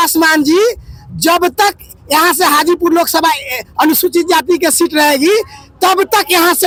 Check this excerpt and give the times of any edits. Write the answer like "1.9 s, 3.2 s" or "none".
none